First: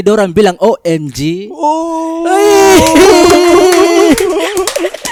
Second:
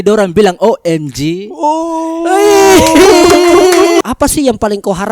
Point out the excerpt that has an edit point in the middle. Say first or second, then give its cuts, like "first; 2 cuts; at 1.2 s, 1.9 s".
second; 1 cut; at 4.0 s